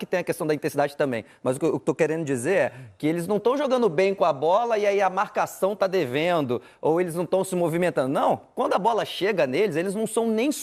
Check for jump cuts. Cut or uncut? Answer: uncut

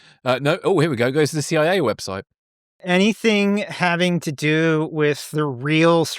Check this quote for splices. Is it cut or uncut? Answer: cut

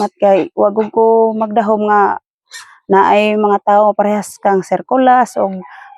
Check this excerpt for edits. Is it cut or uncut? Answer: uncut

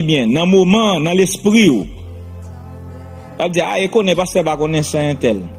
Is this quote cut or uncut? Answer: uncut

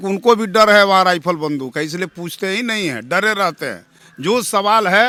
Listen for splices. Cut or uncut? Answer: uncut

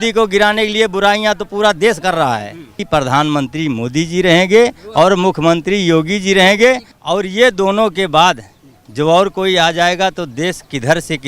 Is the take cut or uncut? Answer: cut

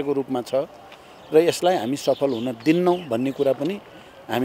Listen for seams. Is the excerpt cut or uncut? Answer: uncut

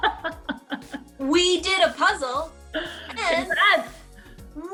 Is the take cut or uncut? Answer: uncut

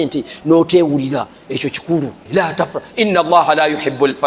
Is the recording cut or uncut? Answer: cut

